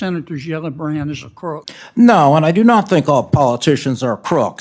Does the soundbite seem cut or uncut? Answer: cut